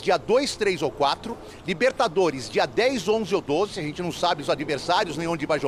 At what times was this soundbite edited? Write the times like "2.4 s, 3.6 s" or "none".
none